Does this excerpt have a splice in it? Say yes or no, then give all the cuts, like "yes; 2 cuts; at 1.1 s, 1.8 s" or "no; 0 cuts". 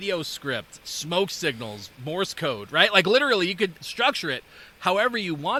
no; 0 cuts